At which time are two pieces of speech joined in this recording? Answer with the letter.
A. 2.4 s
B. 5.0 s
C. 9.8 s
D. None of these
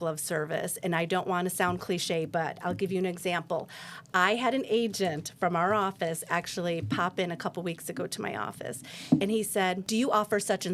C